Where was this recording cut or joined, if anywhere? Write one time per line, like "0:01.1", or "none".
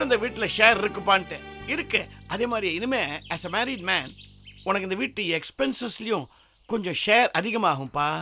none